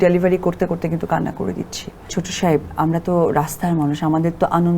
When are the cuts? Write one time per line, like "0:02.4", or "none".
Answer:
0:02.2